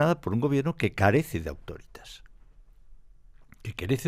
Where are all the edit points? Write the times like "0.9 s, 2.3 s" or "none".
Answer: none